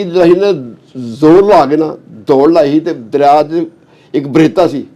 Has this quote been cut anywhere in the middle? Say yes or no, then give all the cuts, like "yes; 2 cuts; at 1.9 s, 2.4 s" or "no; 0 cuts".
no; 0 cuts